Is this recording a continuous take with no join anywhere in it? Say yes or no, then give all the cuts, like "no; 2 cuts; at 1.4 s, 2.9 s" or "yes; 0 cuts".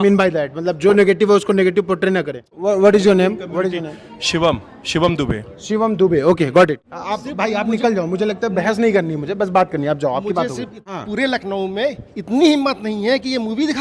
no; 3 cuts; at 2.5 s, 6.9 s, 10.8 s